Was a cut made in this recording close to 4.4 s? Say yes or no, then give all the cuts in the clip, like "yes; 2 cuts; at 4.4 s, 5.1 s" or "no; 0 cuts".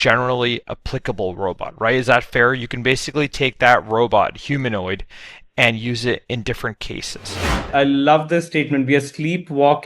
no; 1 cut; at 7.6 s